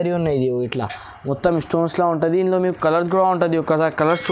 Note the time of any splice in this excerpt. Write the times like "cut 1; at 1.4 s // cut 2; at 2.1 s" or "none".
none